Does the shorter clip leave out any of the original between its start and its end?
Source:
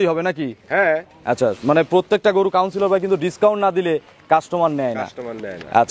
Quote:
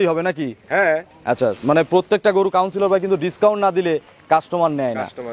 no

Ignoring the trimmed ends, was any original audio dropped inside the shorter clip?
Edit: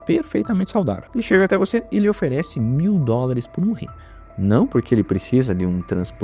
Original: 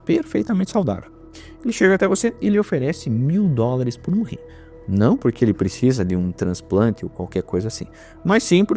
yes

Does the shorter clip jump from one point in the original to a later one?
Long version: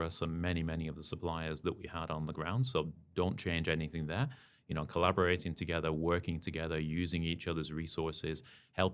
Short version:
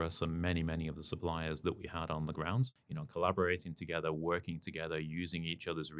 yes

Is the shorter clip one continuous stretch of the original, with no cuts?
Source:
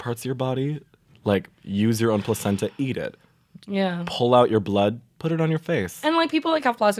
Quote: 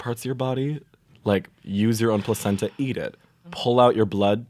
no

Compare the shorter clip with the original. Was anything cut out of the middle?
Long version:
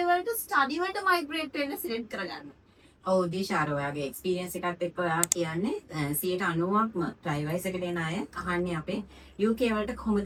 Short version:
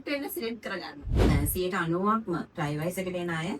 yes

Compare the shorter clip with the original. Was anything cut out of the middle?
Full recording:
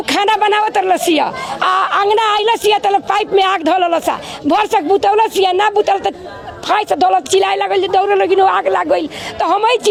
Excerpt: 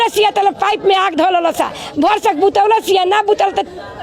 no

